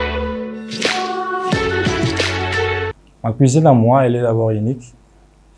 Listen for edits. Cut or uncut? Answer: uncut